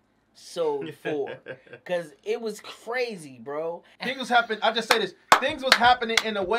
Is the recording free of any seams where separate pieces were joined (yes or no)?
no